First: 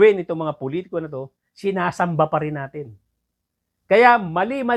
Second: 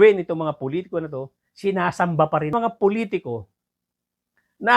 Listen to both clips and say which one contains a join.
second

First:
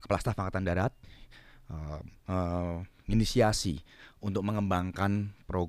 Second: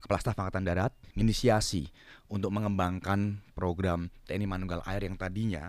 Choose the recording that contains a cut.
second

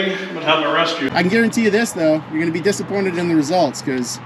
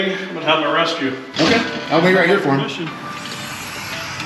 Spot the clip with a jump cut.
first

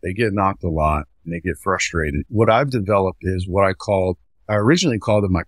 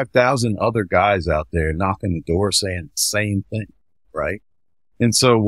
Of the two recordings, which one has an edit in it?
first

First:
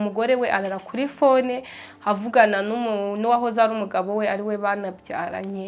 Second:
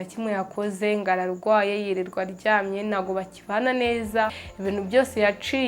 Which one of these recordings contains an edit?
second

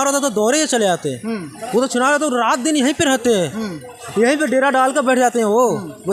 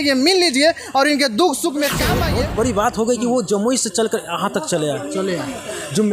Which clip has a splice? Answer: second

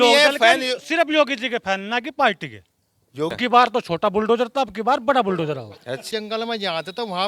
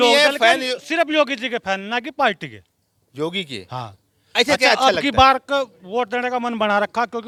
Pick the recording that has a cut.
first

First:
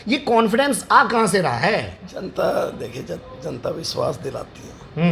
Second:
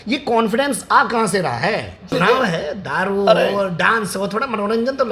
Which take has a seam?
second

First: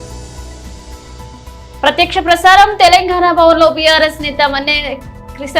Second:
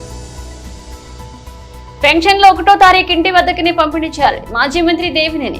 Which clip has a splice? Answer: second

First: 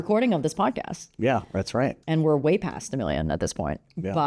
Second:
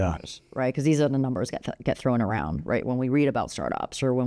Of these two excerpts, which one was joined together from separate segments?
first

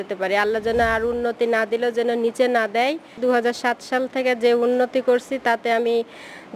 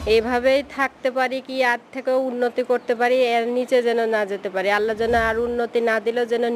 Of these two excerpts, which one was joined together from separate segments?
first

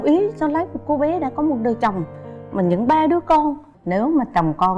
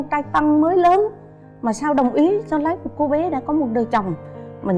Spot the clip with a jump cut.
first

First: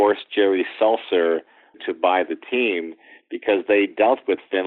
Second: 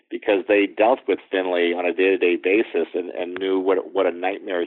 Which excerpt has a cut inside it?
first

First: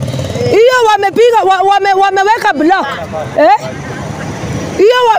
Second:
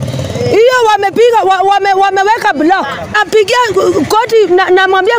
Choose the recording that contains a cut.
second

